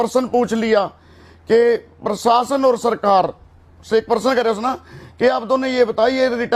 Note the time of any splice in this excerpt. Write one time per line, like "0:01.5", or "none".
none